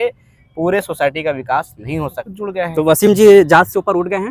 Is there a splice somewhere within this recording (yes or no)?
yes